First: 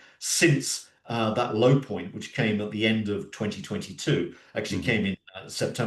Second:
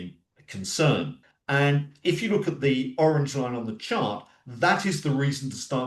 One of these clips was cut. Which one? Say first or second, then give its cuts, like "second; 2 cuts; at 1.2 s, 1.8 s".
second; 1 cut; at 1.2 s